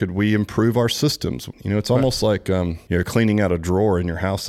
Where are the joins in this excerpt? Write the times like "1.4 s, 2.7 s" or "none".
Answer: 1.5 s, 2.8 s